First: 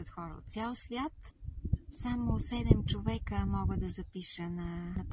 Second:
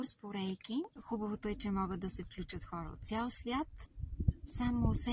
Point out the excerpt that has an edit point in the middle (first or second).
second